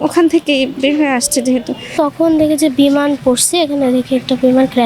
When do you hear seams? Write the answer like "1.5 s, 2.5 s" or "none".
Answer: 1.9 s